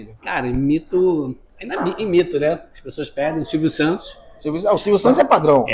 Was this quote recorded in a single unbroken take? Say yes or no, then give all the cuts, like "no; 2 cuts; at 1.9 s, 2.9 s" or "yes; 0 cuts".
yes; 0 cuts